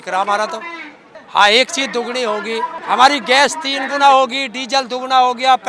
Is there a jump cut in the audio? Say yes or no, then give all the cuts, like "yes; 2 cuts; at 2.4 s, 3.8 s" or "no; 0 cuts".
yes; 2 cuts; at 1.1 s, 2.8 s